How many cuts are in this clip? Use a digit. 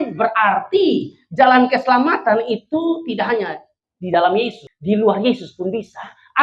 1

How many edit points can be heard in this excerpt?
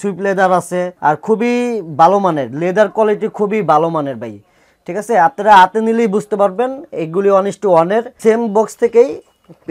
2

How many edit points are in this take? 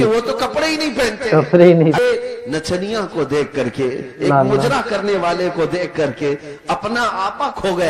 1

